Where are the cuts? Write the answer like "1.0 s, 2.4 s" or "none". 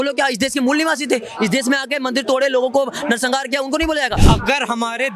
4.2 s